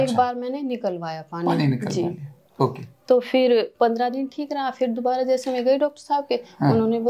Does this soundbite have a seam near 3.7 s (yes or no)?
yes